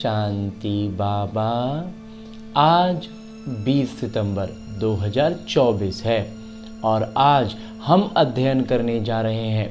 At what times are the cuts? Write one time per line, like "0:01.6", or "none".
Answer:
none